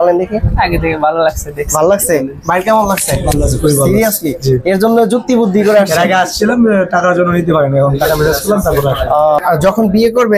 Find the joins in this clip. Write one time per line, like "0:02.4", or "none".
0:09.4